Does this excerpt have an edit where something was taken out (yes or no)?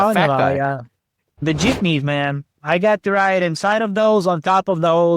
yes